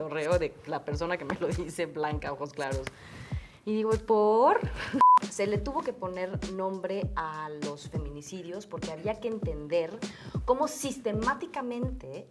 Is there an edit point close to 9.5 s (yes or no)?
no